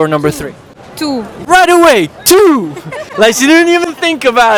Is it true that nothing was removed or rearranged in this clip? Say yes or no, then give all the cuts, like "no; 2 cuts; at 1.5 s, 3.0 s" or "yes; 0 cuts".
yes; 0 cuts